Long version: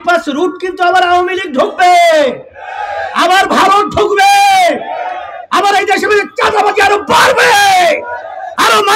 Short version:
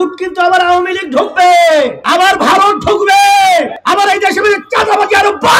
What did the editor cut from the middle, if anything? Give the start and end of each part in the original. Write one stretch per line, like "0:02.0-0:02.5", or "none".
0:02.4-0:03.1
0:04.9-0:05.4